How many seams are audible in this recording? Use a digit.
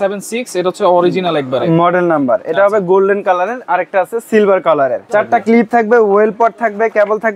1